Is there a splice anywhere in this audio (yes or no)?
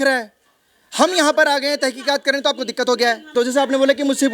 yes